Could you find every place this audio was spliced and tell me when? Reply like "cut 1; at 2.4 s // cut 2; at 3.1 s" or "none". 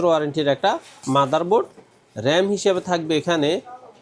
none